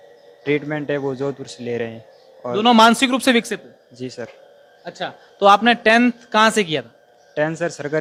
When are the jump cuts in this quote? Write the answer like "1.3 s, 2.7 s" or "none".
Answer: none